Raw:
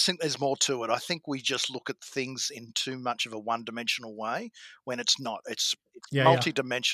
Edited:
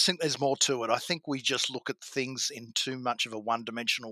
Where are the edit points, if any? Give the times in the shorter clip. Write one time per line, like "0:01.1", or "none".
none